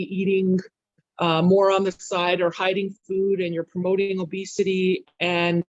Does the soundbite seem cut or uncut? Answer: uncut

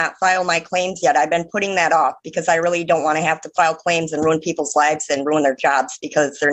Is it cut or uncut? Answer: uncut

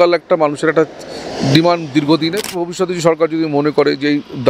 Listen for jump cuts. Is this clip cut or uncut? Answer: cut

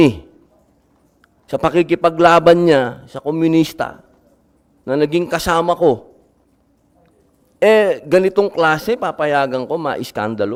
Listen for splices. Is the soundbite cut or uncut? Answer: uncut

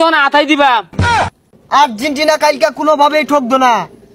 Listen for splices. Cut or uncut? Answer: cut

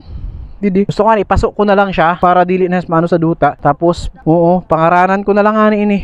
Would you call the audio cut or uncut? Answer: uncut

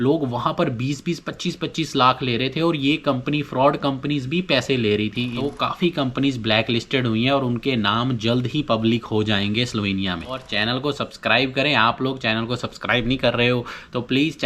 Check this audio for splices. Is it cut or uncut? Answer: cut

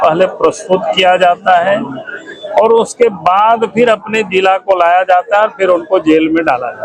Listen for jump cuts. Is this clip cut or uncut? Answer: uncut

